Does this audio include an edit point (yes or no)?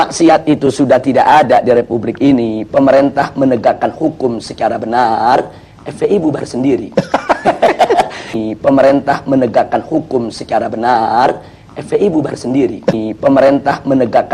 yes